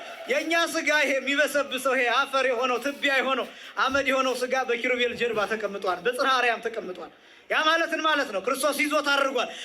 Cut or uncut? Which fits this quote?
uncut